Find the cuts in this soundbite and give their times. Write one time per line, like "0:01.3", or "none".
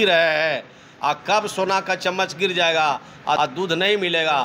0:03.4